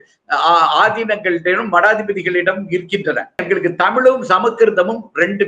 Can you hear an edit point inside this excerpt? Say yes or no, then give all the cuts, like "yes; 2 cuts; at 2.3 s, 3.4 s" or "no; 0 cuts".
yes; 1 cut; at 3.4 s